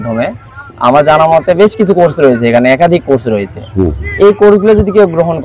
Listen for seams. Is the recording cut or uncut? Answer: uncut